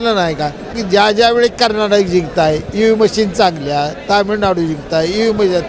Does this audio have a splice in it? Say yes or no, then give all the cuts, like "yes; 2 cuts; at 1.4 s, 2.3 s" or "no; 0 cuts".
yes; 1 cut; at 1.1 s